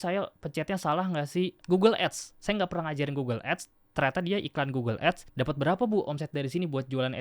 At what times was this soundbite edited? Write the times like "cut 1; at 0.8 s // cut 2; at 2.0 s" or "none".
cut 1; at 1.6 s // cut 2; at 5.3 s